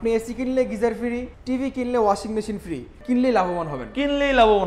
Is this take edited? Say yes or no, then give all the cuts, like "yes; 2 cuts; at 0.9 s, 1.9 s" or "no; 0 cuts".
yes; 2 cuts; at 1.3 s, 3.0 s